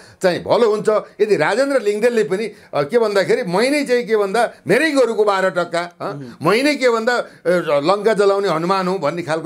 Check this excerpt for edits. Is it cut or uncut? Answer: uncut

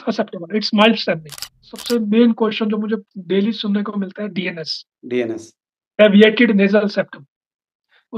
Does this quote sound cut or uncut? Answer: cut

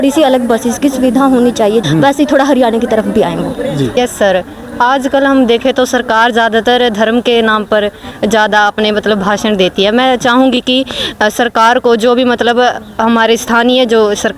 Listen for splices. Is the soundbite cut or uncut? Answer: cut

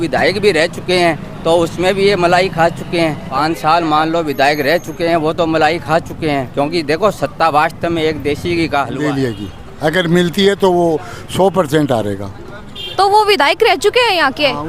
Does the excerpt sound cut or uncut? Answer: cut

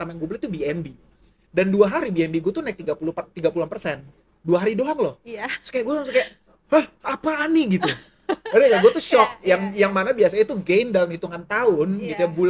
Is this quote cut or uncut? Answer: uncut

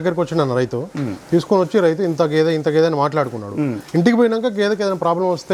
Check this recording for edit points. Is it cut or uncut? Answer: uncut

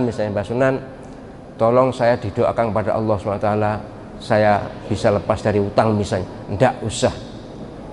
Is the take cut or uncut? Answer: uncut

